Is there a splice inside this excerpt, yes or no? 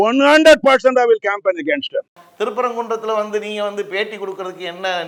no